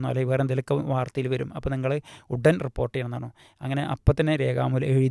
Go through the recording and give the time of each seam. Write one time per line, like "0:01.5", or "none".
none

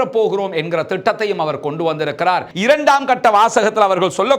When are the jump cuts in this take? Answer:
0:02.5

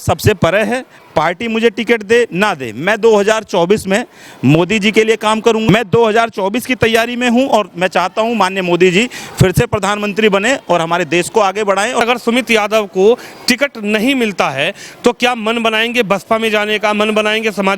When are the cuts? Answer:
0:05.7
0:12.0

